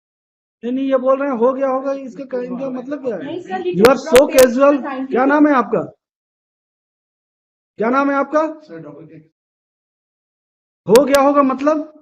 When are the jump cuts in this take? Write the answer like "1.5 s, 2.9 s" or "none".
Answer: 3.6 s